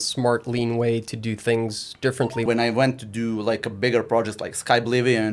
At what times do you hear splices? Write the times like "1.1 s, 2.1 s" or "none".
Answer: 2.5 s